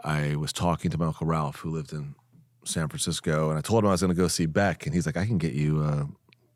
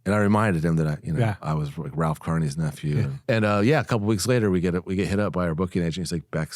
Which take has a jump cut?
second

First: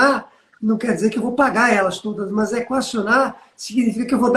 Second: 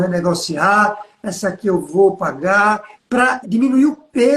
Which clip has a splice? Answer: second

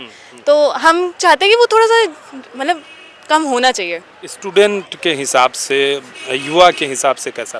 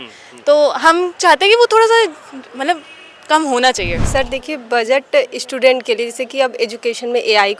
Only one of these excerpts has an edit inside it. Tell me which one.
second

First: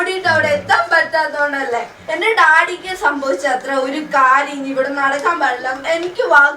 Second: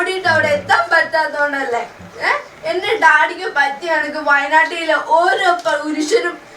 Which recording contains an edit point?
first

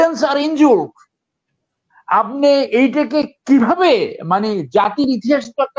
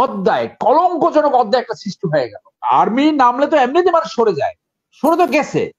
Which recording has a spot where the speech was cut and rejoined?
second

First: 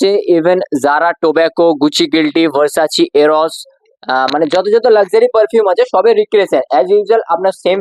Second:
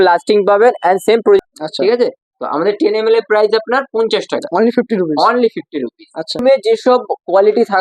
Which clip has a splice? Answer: second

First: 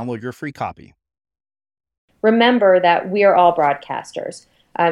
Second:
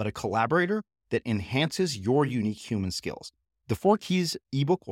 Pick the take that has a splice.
first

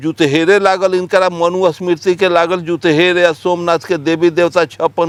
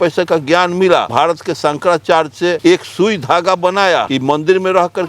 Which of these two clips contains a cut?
second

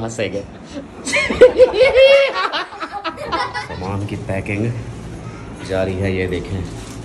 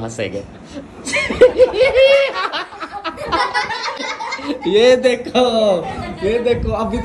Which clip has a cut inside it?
first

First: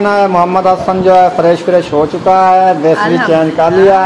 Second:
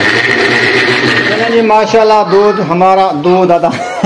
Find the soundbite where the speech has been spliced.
second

